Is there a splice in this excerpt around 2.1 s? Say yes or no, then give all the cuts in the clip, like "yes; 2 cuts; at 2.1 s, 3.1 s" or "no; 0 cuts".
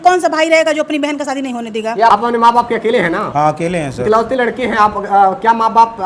yes; 1 cut; at 2.1 s